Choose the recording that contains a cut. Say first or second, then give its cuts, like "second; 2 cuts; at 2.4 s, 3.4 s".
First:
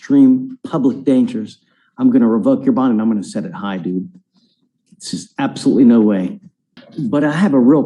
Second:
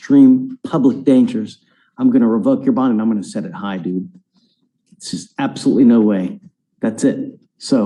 first; 1 cut; at 6.7 s